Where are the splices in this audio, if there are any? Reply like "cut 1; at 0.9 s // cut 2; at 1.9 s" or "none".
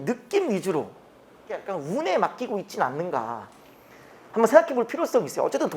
cut 1; at 1.6 s